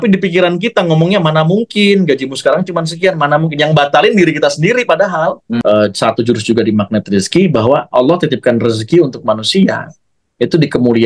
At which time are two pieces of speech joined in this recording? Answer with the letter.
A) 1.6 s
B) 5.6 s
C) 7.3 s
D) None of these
B